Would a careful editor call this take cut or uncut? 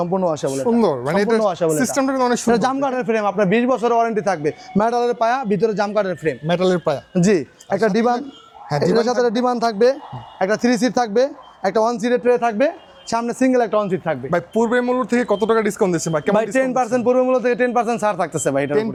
uncut